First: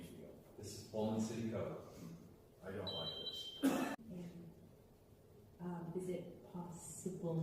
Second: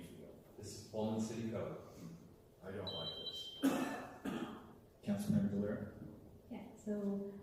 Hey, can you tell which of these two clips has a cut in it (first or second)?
first